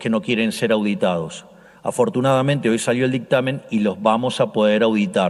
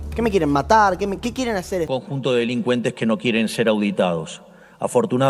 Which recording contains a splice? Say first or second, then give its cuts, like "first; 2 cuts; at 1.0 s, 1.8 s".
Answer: second; 1 cut; at 1.9 s